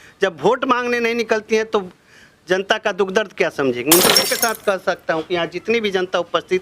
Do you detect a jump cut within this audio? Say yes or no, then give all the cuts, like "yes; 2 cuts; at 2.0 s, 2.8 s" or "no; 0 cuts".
yes; 1 cut; at 4.2 s